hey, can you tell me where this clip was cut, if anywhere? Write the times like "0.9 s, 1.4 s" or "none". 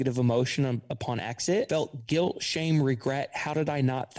1.7 s